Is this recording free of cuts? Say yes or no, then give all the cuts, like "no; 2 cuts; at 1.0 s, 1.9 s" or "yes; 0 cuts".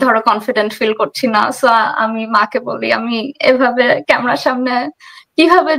yes; 0 cuts